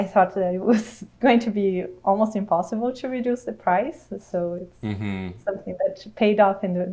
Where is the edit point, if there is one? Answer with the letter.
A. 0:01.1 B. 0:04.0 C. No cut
C